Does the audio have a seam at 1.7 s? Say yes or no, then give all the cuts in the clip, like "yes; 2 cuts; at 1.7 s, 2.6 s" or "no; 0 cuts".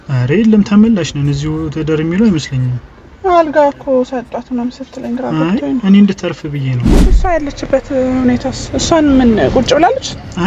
no; 1 cut; at 7.2 s